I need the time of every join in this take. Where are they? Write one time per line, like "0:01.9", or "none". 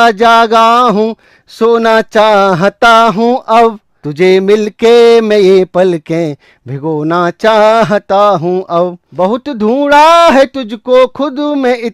0:03.9
0:09.0